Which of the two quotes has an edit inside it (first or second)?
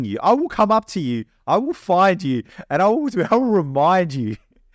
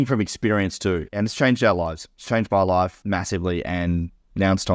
second